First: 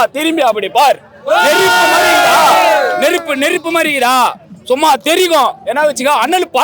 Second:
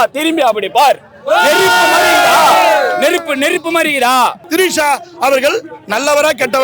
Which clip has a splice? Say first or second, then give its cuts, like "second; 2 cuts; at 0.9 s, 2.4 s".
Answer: second; 1 cut; at 4.4 s